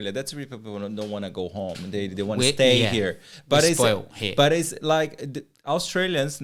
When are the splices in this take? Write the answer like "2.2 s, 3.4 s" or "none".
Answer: none